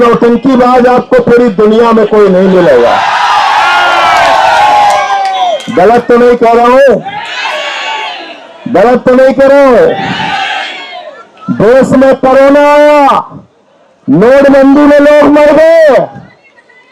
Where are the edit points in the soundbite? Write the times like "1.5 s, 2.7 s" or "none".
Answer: none